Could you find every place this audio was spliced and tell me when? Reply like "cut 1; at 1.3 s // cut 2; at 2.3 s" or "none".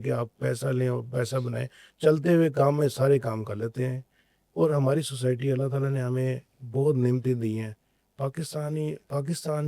none